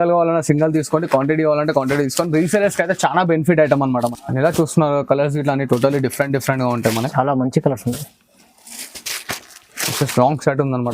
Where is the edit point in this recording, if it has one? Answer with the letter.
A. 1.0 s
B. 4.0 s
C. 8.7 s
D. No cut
B